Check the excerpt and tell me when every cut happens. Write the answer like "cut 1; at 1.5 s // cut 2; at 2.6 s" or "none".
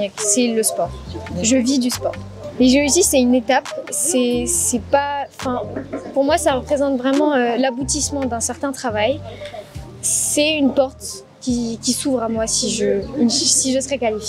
cut 1; at 2.3 s // cut 2; at 9.8 s